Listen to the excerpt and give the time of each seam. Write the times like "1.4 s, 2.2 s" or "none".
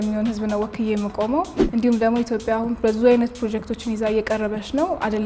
1.6 s

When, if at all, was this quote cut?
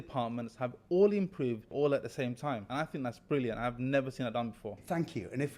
1.7 s, 2.7 s

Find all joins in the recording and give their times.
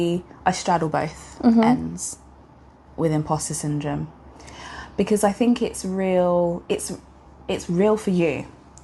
none

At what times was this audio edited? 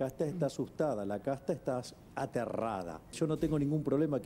3.1 s

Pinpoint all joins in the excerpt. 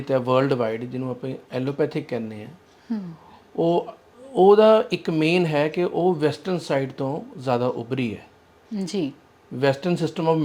none

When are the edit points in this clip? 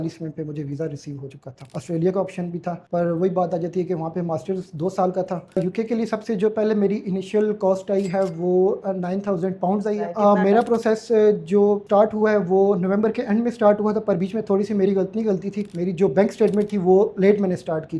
1.6 s, 5.4 s, 10.1 s

